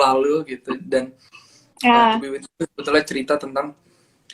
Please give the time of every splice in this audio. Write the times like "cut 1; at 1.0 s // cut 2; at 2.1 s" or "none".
none